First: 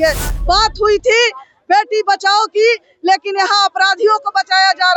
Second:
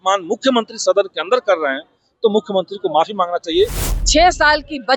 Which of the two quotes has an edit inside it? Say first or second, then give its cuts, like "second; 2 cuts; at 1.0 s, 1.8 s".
second; 1 cut; at 3.8 s